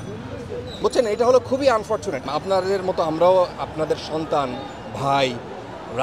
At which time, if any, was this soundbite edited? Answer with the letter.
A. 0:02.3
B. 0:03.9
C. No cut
A